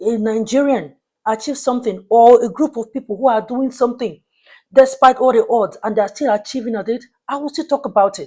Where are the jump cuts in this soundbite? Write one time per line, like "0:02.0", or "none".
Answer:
none